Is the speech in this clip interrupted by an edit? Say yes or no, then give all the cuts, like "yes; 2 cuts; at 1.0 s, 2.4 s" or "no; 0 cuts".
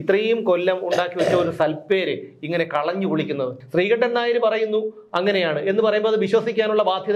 yes; 1 cut; at 3.6 s